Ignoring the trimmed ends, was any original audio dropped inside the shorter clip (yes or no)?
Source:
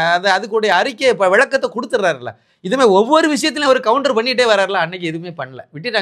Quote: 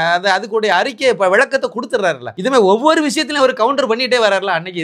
yes